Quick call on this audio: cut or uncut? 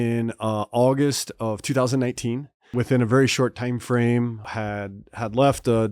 cut